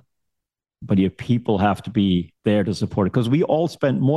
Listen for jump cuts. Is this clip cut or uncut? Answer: cut